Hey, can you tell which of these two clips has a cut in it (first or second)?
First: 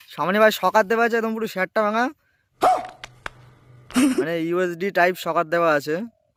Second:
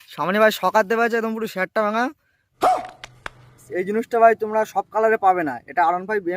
second